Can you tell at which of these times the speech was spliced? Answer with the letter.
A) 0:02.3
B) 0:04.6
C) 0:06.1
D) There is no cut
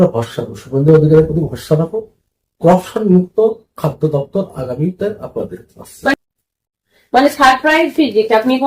C